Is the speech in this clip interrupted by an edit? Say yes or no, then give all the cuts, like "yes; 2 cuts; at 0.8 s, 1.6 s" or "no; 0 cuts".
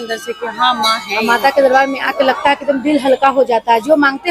yes; 1 cut; at 1.3 s